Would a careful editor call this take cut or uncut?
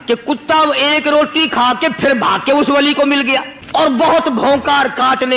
cut